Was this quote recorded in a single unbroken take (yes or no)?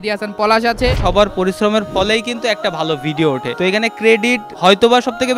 no